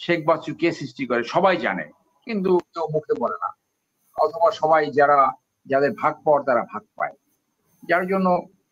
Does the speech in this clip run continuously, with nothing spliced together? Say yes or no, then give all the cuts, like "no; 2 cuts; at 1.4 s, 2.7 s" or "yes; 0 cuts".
yes; 0 cuts